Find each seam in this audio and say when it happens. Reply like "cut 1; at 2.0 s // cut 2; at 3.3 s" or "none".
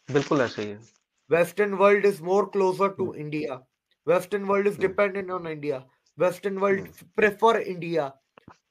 none